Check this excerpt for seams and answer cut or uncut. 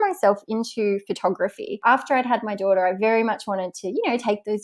cut